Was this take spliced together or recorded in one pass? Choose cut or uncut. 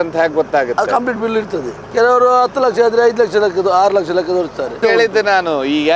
cut